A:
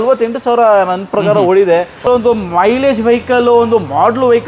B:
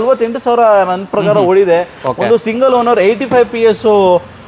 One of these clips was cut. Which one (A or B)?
A